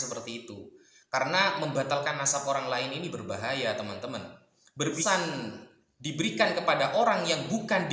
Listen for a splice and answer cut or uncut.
cut